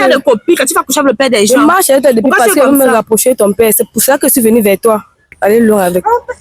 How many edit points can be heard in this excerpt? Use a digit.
1